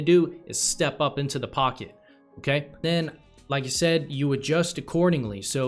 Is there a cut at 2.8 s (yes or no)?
yes